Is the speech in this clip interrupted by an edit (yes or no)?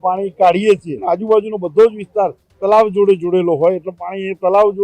yes